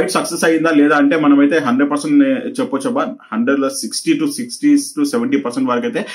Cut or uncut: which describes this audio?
uncut